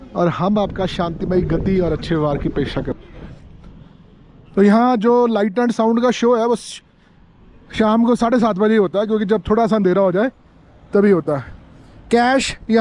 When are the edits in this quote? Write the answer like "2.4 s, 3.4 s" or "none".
3.0 s